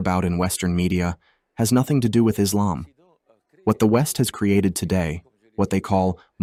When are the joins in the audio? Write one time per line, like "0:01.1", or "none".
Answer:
none